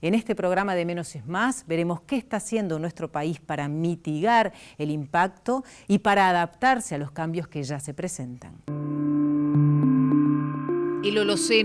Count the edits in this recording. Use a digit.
1